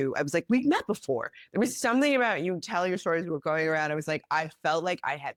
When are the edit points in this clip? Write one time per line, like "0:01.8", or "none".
none